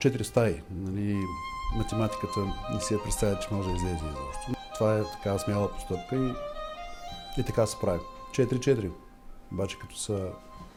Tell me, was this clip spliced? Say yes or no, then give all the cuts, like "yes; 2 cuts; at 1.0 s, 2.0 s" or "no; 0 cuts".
no; 0 cuts